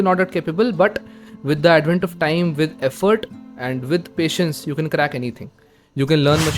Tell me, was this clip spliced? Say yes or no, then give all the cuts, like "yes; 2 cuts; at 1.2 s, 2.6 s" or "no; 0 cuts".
no; 0 cuts